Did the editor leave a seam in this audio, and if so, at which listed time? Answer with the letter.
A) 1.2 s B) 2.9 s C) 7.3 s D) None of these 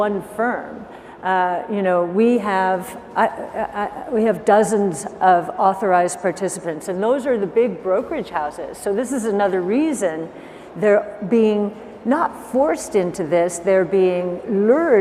D